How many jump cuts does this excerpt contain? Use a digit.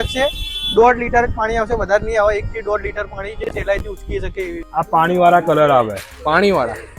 1